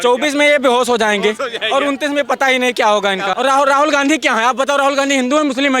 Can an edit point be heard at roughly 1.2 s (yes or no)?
no